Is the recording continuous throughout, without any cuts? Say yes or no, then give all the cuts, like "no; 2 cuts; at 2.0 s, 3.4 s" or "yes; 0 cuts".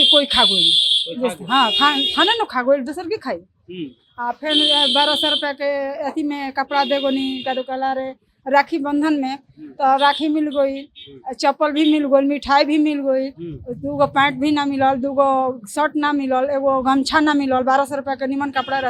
yes; 0 cuts